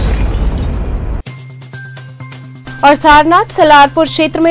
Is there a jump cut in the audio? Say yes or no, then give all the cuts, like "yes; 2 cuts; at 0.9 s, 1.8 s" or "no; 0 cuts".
yes; 1 cut; at 2.5 s